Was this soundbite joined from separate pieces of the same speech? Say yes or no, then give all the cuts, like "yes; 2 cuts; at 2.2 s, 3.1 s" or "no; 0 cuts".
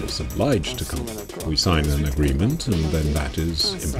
yes; 1 cut; at 1.3 s